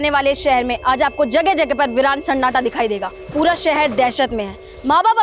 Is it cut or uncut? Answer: cut